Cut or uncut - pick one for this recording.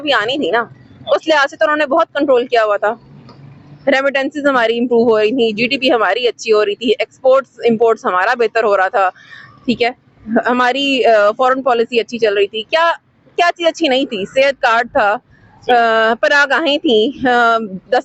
uncut